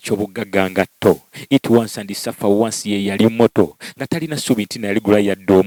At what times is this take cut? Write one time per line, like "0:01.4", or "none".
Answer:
none